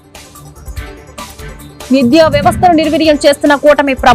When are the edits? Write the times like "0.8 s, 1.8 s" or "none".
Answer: none